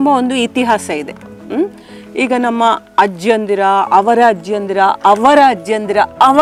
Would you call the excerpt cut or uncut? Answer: uncut